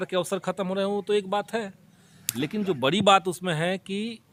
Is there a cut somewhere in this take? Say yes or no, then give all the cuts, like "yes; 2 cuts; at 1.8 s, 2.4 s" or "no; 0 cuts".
no; 0 cuts